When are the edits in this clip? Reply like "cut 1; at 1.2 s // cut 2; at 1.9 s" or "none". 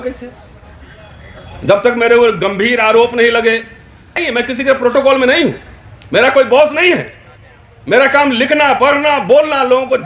cut 1; at 4.2 s